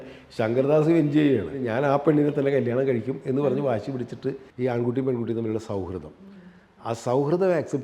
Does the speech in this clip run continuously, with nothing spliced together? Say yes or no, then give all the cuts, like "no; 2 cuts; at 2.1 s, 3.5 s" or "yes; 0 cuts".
no; 2 cuts; at 1.6 s, 4.5 s